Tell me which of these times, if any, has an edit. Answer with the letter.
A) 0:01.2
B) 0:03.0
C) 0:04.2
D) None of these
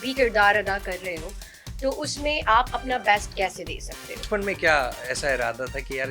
C